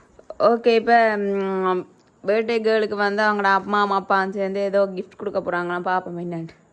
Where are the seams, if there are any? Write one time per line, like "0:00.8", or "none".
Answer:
none